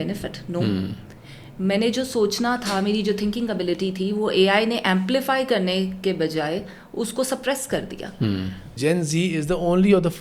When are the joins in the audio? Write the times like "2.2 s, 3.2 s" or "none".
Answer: 8.7 s